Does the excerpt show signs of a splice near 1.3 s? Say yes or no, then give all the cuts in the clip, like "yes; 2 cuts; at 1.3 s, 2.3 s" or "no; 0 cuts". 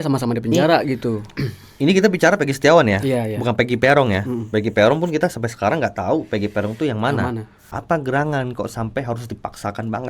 yes; 2 cuts; at 1.3 s, 7.8 s